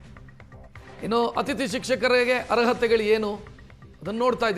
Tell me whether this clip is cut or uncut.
cut